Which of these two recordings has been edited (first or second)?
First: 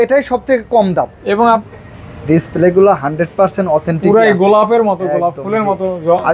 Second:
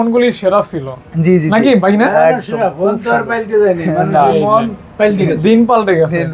first